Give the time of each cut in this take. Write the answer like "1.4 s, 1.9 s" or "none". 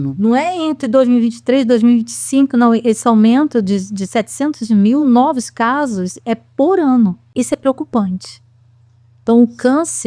7.2 s